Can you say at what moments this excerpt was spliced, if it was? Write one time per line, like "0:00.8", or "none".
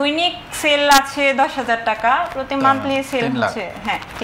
none